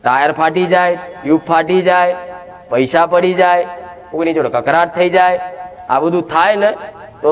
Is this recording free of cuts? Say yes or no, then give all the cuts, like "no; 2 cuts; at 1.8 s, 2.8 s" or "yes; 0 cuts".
yes; 0 cuts